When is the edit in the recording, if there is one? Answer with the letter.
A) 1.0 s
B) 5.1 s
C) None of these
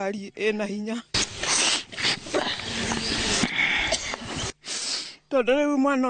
C